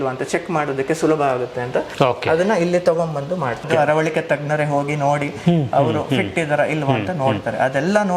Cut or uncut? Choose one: cut